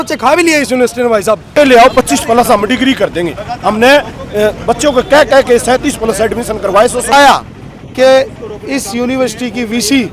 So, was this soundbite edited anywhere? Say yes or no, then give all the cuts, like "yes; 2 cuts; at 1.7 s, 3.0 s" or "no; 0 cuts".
yes; 2 cuts; at 1.5 s, 7.1 s